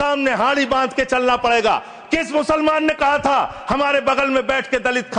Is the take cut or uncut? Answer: uncut